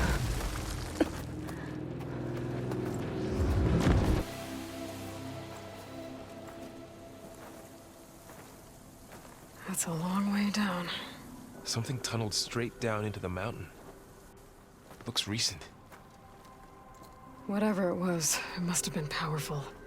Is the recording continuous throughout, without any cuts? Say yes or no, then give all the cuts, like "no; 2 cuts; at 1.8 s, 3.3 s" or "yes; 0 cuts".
no; 1 cut; at 4.2 s